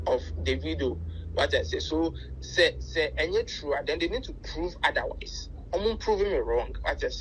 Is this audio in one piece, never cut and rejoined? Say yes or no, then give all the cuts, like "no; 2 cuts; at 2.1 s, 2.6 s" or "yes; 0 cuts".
yes; 0 cuts